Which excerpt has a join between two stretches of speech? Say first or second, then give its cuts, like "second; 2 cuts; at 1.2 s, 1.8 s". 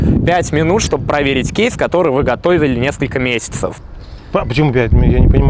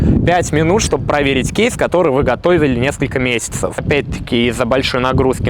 second; 1 cut; at 3.8 s